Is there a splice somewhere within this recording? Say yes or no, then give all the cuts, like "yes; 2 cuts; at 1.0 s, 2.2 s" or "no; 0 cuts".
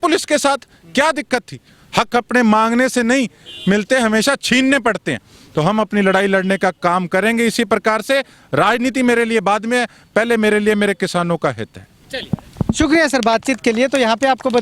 no; 0 cuts